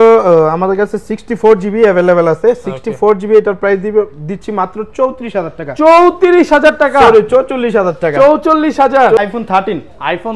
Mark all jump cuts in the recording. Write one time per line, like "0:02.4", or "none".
0:09.2